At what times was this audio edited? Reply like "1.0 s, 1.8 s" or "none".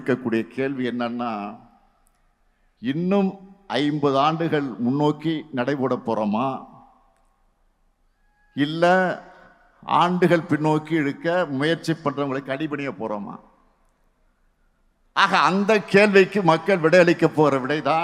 none